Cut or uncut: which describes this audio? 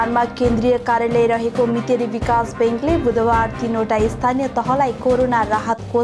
uncut